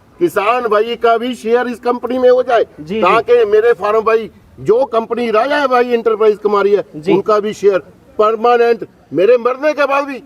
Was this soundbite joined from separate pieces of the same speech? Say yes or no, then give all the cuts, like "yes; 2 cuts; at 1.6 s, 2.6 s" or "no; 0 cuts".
no; 0 cuts